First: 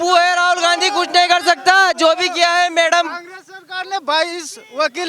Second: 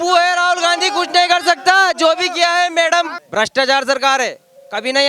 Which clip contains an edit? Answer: second; 1 cut; at 3.2 s

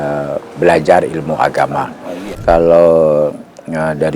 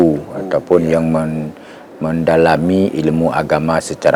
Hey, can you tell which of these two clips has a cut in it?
first; 1 cut; at 2.4 s

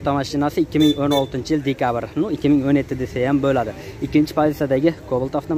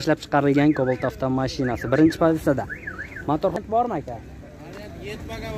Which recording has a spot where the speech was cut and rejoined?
second; 1 cut; at 3.6 s

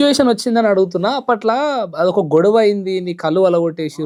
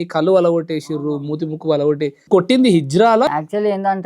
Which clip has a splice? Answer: second; 2 cuts; at 2.2 s, 3.3 s

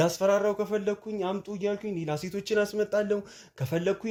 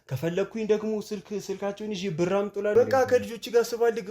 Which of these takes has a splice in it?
second; 1 cut; at 2.7 s

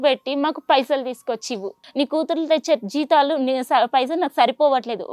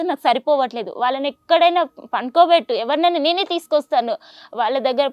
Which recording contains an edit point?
first; 1 cut; at 1.8 s

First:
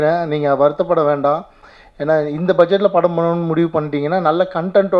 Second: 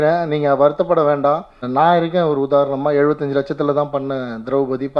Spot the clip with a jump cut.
second; 1 cut; at 1.6 s

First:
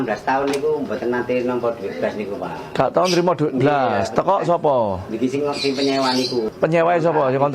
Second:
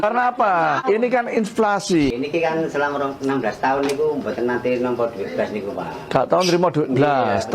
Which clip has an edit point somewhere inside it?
second; 1 cut; at 2.1 s

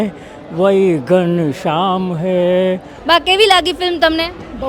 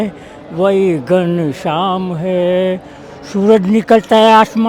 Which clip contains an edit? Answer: first; 1 cut; at 2.9 s

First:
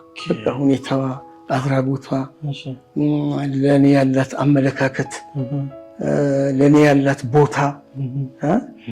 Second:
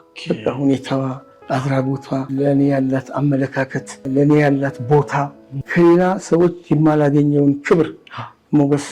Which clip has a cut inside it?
second; 3 cuts; at 2.3 s, 4.1 s, 5.5 s

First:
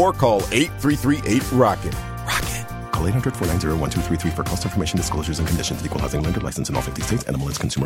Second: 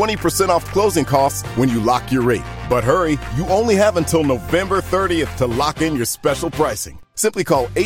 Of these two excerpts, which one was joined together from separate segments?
second; 1 cut; at 1.4 s

